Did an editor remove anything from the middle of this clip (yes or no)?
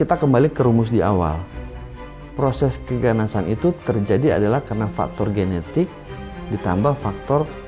no